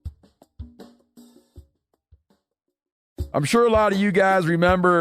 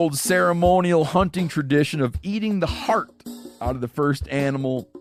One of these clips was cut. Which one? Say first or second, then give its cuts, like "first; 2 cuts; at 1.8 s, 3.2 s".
first; 1 cut; at 3.1 s